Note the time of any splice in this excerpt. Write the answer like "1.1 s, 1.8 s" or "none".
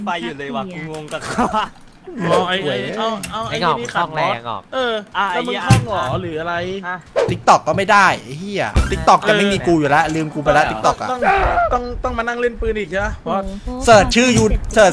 2.3 s, 7.1 s, 8.9 s